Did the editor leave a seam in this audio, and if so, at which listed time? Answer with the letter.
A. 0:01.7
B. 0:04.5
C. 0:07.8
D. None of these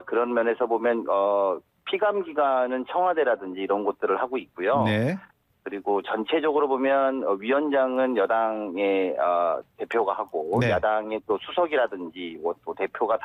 A